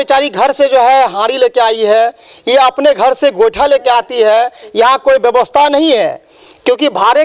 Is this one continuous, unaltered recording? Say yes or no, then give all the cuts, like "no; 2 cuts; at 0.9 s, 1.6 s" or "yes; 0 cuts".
yes; 0 cuts